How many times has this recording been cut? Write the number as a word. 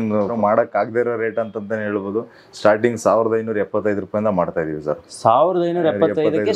zero